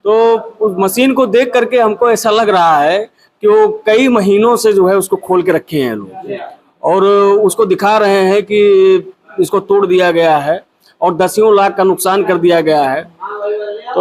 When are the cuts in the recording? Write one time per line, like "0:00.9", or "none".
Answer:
none